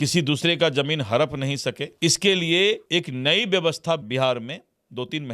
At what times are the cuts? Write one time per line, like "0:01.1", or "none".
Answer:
0:01.9
0:02.8
0:04.0